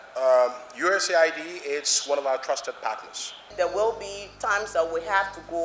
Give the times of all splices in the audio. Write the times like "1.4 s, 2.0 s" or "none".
3.5 s